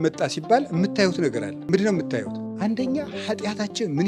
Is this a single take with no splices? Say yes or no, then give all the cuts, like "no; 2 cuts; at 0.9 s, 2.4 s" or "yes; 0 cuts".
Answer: no; 2 cuts; at 1.5 s, 2.4 s